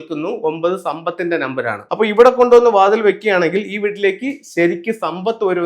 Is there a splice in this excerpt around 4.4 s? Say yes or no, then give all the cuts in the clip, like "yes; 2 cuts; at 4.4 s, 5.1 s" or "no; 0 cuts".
no; 1 cut; at 1.8 s